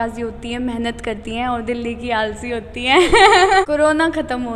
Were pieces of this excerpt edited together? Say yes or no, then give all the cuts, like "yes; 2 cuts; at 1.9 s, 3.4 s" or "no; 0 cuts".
yes; 1 cut; at 3.7 s